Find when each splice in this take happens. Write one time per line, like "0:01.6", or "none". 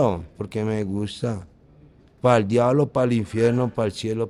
none